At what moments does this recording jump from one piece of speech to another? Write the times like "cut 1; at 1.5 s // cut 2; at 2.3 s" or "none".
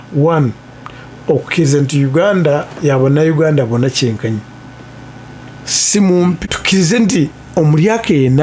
none